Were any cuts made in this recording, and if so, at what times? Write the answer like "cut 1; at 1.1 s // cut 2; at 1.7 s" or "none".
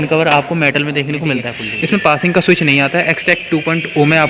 cut 1; at 1.6 s